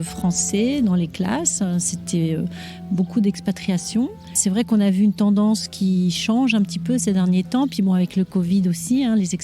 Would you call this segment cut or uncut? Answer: cut